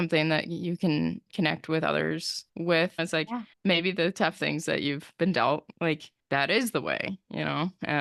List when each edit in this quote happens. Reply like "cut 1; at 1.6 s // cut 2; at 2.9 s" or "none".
cut 1; at 3.0 s